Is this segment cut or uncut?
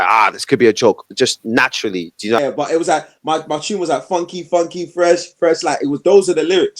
cut